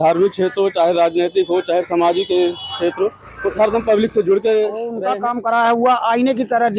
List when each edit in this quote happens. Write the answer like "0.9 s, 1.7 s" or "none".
4.9 s